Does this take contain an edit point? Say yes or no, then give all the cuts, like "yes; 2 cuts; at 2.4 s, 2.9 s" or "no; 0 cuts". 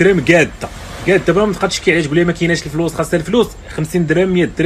no; 0 cuts